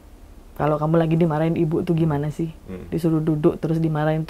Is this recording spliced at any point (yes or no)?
no